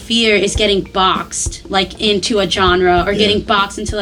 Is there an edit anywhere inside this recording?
no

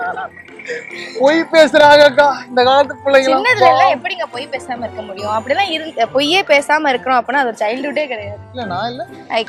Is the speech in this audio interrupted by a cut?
no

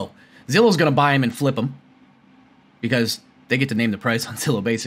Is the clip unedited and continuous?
yes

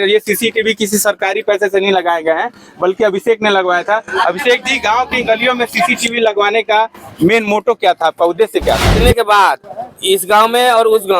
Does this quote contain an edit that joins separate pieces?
yes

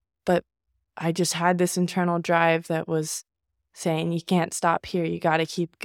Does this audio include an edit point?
no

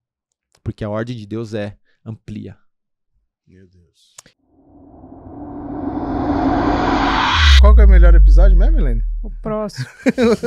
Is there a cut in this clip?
yes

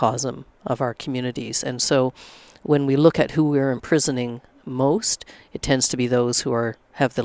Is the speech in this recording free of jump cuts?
yes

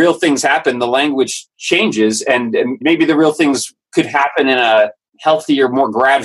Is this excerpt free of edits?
no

